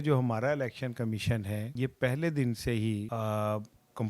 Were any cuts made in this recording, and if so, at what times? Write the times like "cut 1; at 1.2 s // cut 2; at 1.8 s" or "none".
cut 1; at 1.7 s // cut 2; at 3.1 s